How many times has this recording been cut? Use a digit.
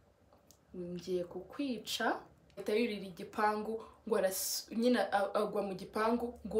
1